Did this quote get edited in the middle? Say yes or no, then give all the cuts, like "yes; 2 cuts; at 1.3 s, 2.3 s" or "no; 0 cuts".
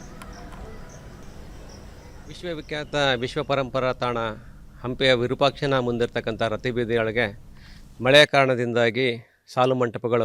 yes; 1 cut; at 1.2 s